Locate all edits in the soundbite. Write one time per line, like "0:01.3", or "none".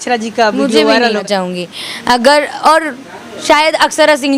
0:01.2